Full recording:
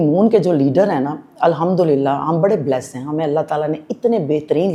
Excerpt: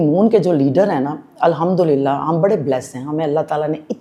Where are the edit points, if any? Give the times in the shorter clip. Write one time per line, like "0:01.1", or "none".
none